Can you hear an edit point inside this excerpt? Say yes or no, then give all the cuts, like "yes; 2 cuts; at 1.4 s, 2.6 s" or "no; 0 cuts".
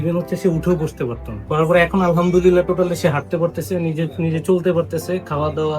yes; 1 cut; at 1.4 s